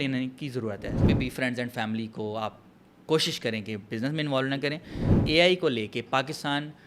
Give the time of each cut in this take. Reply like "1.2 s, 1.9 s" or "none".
0.9 s, 5.1 s